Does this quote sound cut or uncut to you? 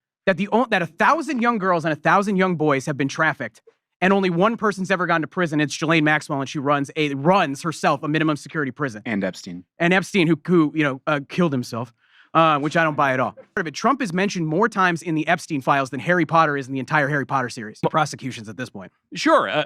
cut